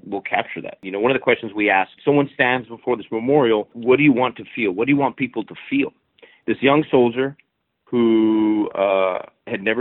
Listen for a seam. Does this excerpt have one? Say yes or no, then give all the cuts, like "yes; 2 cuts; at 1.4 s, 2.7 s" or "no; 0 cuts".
yes; 4 cuts; at 0.8 s, 2.0 s, 3.8 s, 6.2 s